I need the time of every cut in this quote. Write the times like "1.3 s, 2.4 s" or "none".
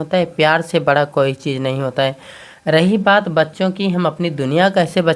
none